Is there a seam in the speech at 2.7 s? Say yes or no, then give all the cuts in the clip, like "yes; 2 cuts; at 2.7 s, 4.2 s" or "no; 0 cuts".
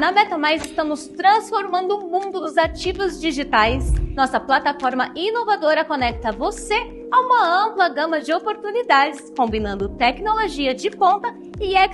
no; 0 cuts